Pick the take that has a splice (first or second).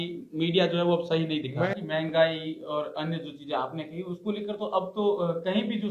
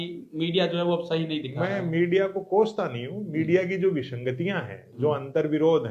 first